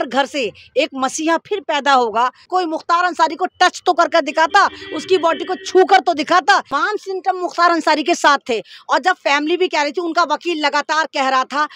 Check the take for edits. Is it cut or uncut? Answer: cut